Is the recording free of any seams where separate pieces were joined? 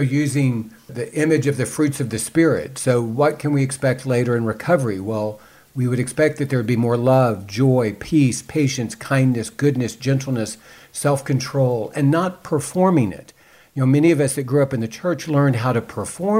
no; 2 cuts; at 0.9 s, 8.0 s

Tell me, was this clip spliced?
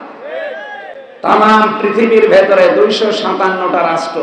no; 0 cuts

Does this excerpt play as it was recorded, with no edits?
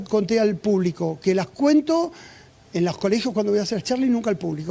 yes; 0 cuts

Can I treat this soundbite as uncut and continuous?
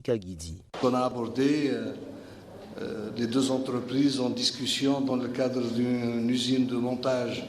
no; 1 cut; at 1.4 s

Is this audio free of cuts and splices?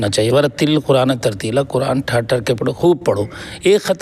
yes; 0 cuts

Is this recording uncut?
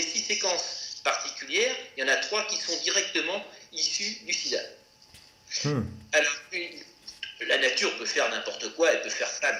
yes; 0 cuts

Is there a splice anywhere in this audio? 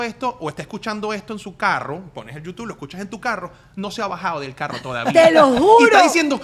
no; 0 cuts

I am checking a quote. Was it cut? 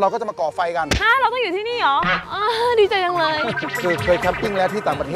yes; 3 cuts; at 0.9 s, 2.1 s, 3.7 s

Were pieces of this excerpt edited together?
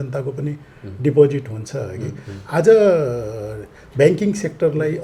no; 0 cuts

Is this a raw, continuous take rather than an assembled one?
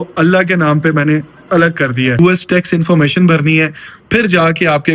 no; 1 cut; at 2.2 s

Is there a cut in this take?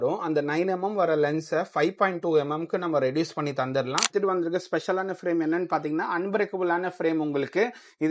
yes; 1 cut; at 4.1 s

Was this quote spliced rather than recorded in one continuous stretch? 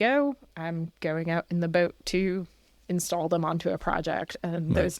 no; 0 cuts

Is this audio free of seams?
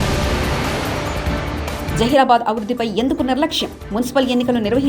no; 1 cut; at 1.6 s

